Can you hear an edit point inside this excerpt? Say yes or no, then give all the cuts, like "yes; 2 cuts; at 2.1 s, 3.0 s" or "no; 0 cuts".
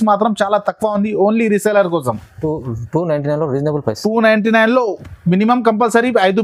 no; 0 cuts